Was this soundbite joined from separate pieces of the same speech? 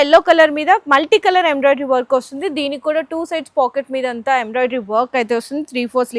no; 0 cuts

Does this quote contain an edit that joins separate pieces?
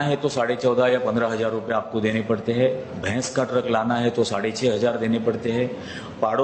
no; 0 cuts

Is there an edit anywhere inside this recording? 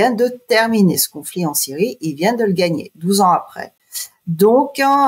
no; 0 cuts

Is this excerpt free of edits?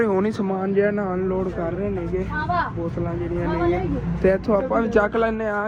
yes; 0 cuts

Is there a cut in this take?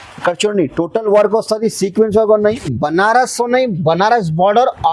yes; 1 cut; at 2.7 s

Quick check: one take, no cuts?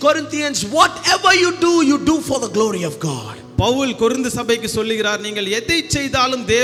yes; 0 cuts

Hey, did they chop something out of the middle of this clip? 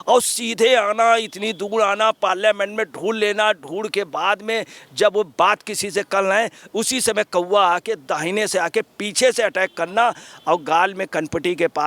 no; 0 cuts

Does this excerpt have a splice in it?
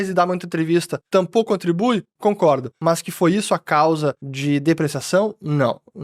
yes; 3 cuts; at 1.0 s, 2.7 s, 4.3 s

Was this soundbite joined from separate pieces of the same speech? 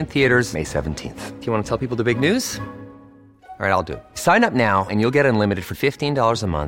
no; 0 cuts

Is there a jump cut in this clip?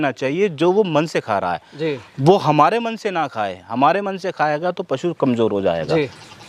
no; 0 cuts

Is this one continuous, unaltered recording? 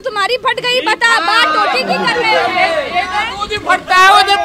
yes; 0 cuts

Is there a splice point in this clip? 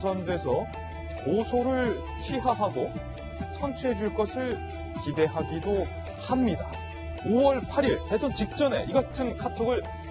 yes; 1 cut; at 8.8 s

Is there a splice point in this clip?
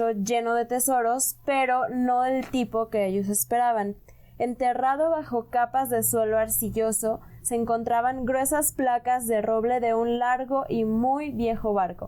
no; 0 cuts

